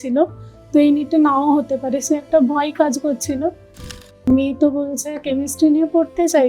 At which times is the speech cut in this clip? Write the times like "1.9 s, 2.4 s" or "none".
3.7 s